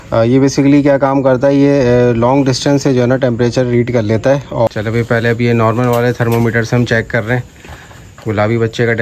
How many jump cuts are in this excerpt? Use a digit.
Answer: 1